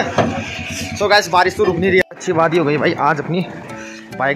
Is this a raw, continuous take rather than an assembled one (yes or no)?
no